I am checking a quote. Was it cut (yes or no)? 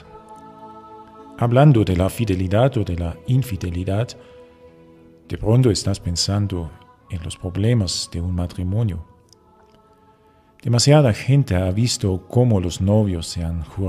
yes